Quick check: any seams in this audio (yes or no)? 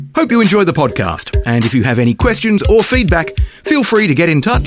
no